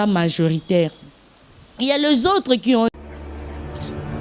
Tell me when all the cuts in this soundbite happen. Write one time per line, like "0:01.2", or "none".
0:02.9